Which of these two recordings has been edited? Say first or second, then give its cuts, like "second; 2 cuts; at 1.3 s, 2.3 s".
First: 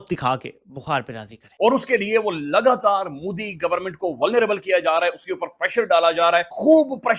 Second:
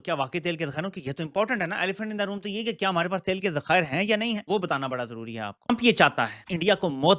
first; 1 cut; at 1.5 s